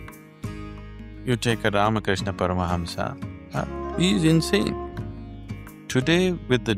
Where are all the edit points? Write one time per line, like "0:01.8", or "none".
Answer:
0:01.2